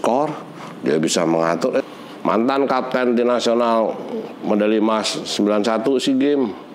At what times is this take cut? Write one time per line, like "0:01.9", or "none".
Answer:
0:01.8